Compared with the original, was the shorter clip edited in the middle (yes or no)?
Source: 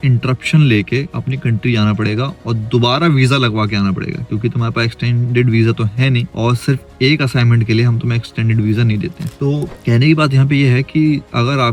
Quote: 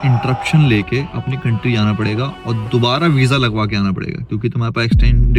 no